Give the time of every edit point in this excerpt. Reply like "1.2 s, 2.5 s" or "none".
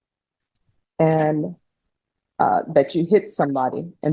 none